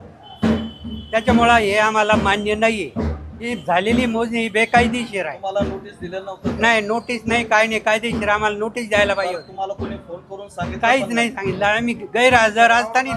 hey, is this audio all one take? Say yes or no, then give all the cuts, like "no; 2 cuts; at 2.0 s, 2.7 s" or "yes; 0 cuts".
no; 1 cut; at 3.6 s